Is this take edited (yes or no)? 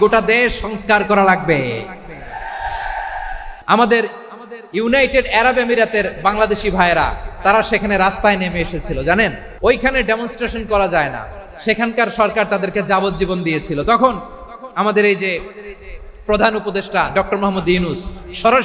yes